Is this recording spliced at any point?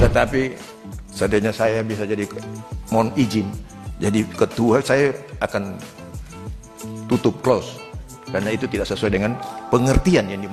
no; 0 cuts

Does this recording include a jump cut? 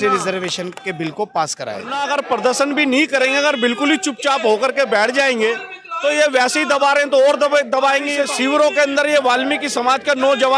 yes; 2 cuts; at 1.9 s, 8.2 s

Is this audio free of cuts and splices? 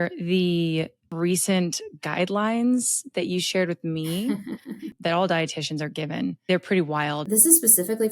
no; 4 cuts; at 1.0 s, 4.9 s, 6.4 s, 7.2 s

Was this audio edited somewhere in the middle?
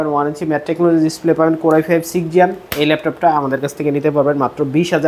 no; 0 cuts

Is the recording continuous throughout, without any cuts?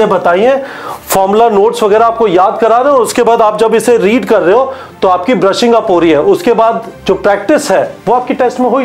no; 2 cuts; at 6.9 s, 8.0 s

